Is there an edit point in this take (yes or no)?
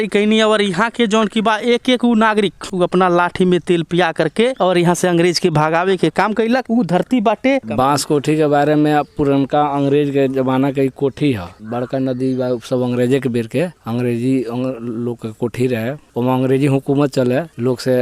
yes